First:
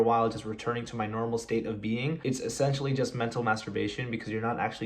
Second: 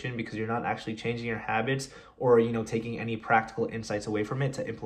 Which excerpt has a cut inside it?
first; 1 cut; at 2.2 s

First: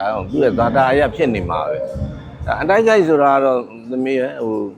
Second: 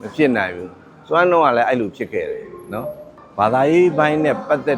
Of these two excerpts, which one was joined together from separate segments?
second; 1 cut; at 3.1 s

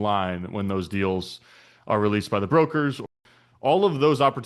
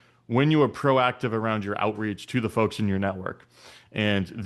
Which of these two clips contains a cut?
first; 1 cut; at 3.1 s

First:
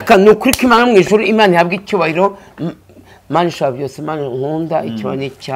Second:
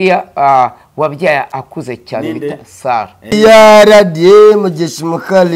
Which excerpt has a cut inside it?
second; 1 cut; at 3.3 s

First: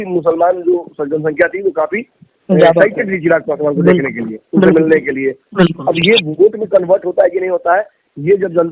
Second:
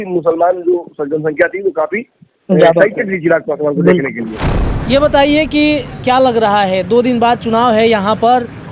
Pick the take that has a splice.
second; 1 cut; at 4.4 s

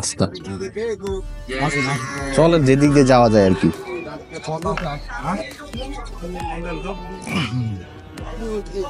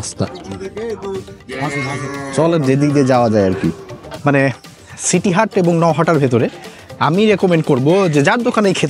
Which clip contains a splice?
second; 1 cut; at 4.0 s

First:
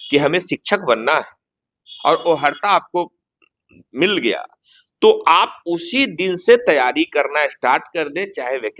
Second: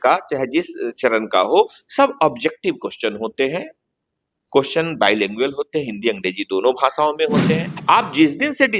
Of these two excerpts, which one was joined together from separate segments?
second; 1 cut; at 7.7 s

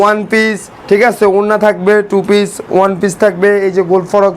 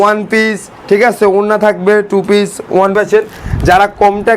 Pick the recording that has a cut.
second; 1 cut; at 2.9 s

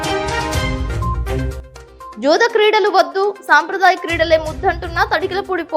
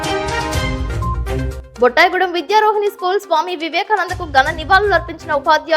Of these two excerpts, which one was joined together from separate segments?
first; 1 cut; at 1.6 s

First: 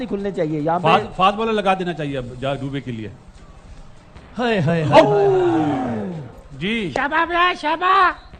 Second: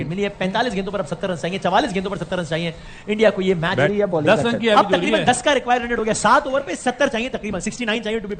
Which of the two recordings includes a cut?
second; 1 cut; at 3.9 s

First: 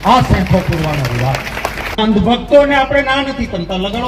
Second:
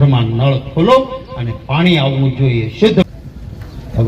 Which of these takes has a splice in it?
second; 2 cuts; at 1.3 s, 3.1 s

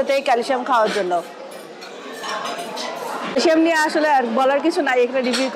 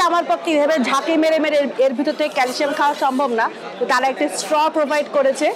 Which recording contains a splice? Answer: first; 1 cut; at 3.4 s

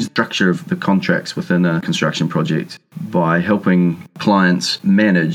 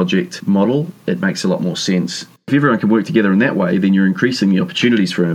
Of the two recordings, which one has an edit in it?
second; 2 cuts; at 0.9 s, 2.5 s

